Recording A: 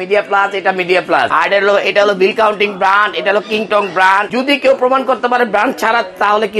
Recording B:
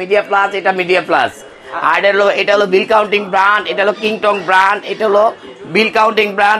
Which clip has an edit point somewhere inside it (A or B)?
A